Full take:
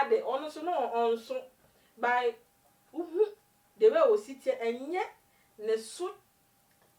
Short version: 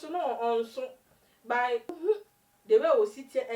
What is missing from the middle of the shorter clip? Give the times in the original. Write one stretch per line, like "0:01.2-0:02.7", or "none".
0:02.4-0:03.0